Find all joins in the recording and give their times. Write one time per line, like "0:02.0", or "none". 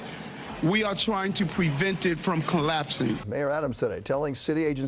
0:03.3